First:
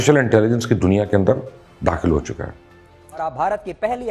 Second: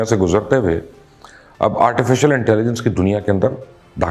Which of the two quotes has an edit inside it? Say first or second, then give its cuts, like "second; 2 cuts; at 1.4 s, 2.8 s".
first; 1 cut; at 3.0 s